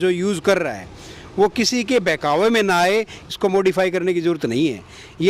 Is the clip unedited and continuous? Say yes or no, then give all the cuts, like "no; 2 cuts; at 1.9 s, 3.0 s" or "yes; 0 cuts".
no; 1 cut; at 3.3 s